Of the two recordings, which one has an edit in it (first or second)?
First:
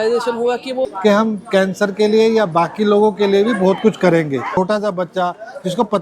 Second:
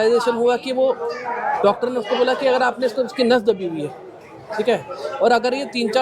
first